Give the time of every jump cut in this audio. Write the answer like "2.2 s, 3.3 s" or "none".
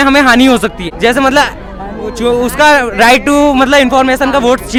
none